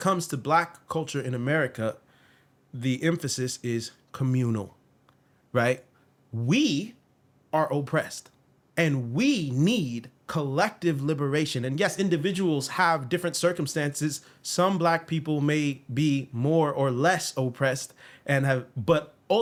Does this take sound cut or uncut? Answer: uncut